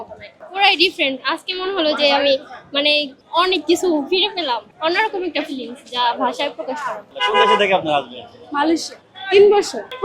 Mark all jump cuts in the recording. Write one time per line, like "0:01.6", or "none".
0:07.2